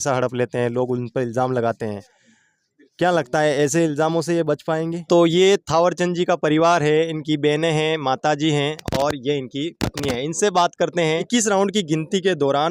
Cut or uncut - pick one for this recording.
cut